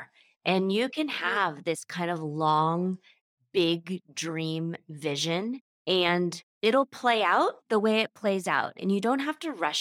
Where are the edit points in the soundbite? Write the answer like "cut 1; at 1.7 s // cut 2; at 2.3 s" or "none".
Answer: cut 1; at 8.8 s